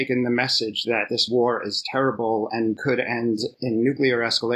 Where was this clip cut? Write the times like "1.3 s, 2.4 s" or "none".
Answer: none